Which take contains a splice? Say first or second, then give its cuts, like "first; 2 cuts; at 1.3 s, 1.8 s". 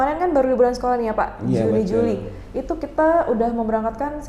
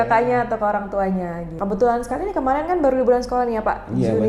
second; 1 cut; at 1.5 s